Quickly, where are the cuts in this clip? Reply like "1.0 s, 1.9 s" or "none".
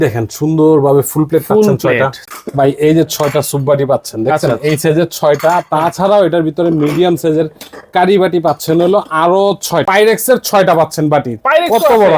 2.3 s, 9.8 s